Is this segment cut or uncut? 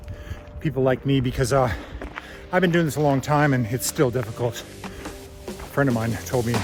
uncut